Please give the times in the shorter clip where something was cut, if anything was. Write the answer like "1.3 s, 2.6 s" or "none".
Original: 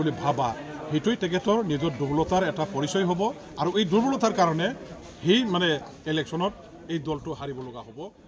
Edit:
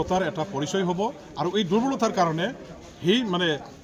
none